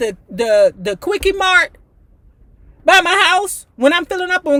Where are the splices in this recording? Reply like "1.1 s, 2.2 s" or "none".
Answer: none